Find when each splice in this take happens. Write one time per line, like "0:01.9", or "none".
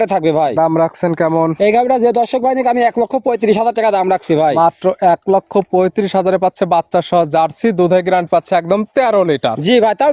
none